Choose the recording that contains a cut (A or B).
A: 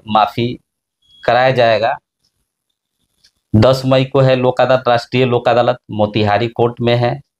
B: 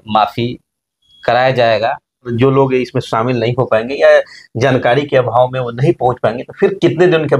B